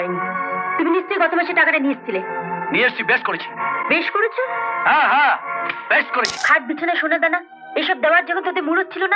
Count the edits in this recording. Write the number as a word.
one